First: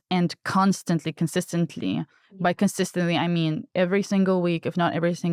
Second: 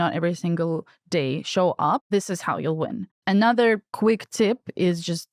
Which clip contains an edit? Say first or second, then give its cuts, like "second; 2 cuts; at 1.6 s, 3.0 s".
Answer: second; 3 cuts; at 2.0 s, 3.1 s, 3.9 s